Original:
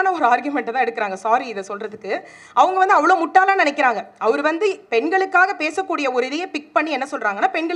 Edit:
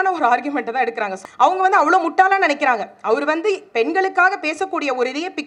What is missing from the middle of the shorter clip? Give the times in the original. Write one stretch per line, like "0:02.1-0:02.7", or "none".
0:01.2-0:02.3